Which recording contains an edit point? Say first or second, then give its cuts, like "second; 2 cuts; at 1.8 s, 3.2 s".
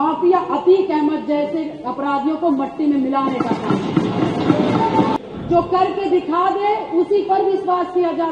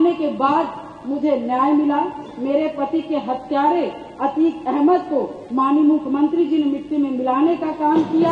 first; 1 cut; at 5.1 s